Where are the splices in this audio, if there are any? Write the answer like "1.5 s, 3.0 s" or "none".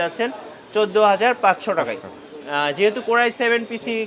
none